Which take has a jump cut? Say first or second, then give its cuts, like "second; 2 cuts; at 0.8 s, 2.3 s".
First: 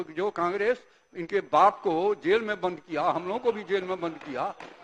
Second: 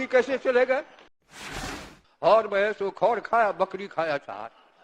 second; 1 cut; at 1.6 s